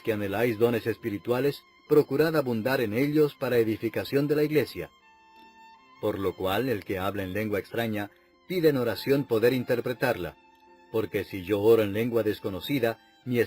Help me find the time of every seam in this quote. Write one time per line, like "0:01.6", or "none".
0:09.1